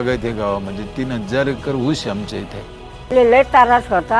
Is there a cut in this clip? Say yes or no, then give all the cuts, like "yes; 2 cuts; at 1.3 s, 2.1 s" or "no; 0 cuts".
yes; 1 cut; at 3.1 s